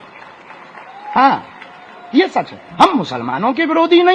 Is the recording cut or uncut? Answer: uncut